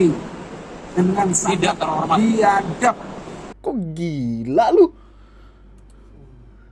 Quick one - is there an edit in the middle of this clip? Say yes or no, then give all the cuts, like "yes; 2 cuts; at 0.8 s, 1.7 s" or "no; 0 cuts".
yes; 1 cut; at 3.4 s